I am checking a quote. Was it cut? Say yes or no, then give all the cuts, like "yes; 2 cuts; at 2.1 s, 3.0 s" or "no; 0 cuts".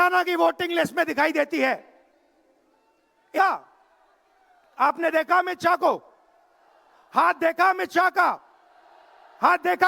yes; 1 cut; at 3.4 s